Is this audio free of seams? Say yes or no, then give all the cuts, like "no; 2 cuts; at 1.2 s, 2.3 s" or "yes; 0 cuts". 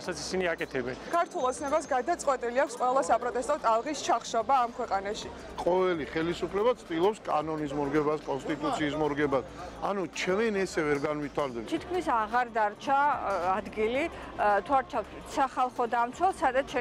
no; 3 cuts; at 1.1 s, 5.3 s, 11.7 s